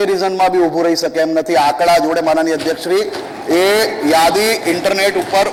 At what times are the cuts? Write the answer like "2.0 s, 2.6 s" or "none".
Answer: none